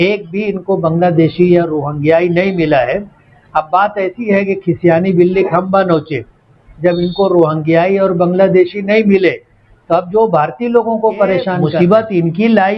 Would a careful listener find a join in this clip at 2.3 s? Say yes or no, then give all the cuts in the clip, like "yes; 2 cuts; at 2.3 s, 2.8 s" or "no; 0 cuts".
no; 1 cut; at 11.6 s